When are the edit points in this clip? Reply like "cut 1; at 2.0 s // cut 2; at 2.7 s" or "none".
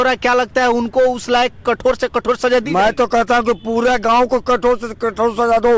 none